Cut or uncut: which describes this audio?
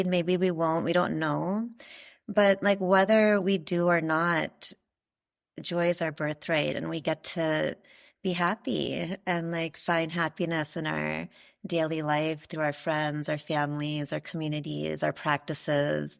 uncut